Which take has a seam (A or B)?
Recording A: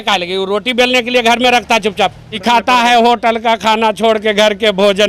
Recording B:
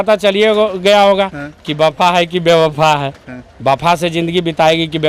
A